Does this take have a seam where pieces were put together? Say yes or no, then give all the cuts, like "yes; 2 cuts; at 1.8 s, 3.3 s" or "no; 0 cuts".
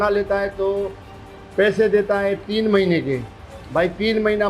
no; 0 cuts